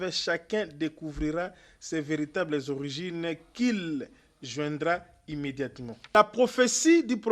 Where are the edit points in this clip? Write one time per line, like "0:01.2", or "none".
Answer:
0:06.1